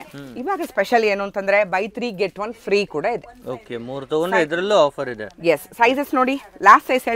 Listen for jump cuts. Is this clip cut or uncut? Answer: uncut